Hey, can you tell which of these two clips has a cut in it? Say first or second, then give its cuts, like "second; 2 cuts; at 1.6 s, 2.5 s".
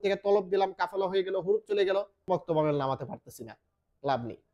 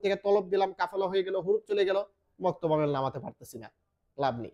first; 1 cut; at 2.2 s